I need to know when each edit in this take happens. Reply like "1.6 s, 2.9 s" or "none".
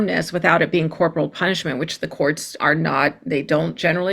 none